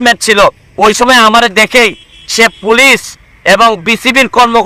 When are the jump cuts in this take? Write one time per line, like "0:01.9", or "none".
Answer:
none

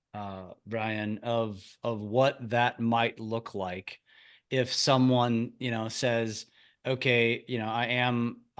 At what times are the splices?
none

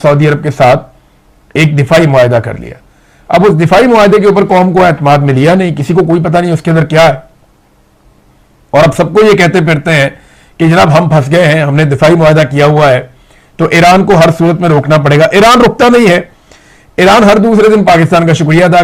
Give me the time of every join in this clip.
none

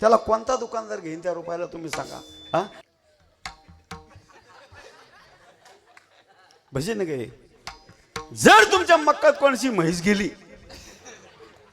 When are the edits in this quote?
0:02.8

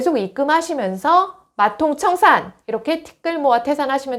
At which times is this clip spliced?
none

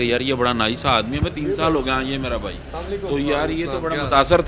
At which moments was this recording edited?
none

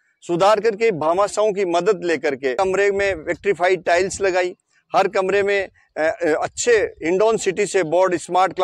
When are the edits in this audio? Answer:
0:02.5

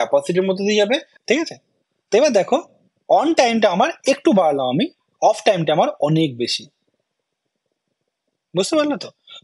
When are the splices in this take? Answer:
0:01.1

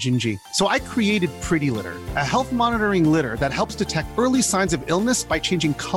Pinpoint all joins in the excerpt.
none

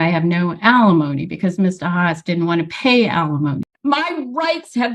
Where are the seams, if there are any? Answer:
0:03.7

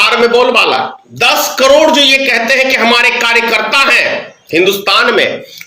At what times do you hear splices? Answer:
0:01.1

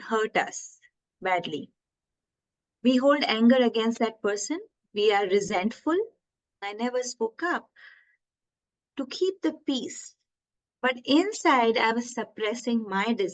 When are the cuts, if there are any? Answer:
0:06.6
0:11.9

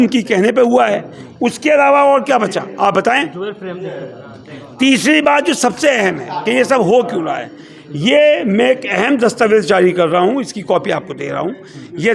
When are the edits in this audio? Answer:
none

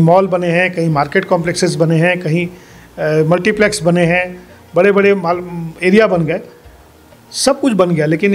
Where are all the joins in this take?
none

